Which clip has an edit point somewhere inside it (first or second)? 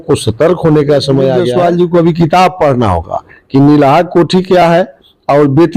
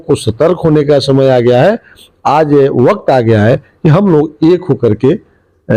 first